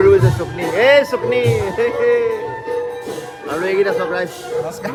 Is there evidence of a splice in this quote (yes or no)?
no